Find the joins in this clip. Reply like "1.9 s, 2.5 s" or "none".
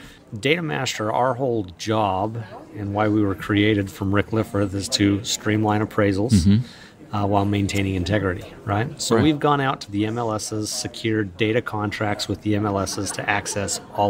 none

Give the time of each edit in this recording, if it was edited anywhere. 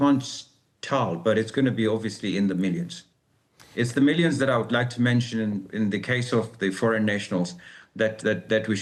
none

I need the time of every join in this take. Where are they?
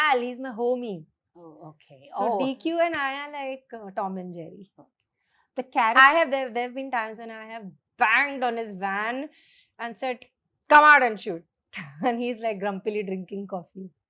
none

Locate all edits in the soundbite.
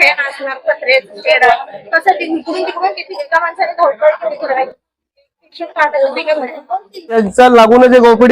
7.1 s

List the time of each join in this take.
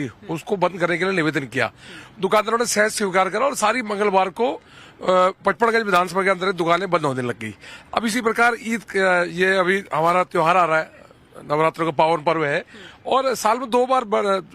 10.6 s

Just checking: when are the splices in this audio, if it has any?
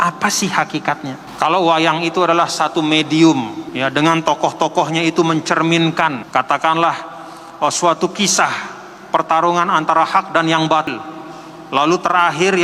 1.2 s, 3.6 s, 6.2 s, 10.9 s

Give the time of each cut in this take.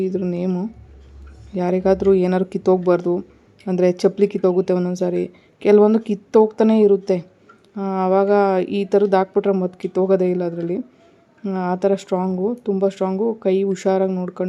none

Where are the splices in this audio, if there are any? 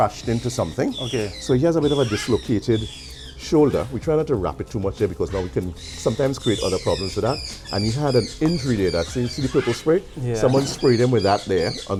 none

